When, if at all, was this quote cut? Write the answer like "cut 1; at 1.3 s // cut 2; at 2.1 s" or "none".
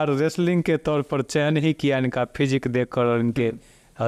none